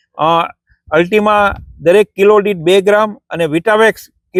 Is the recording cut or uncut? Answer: uncut